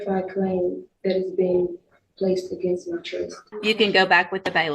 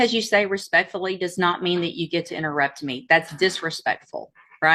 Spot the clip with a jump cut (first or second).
first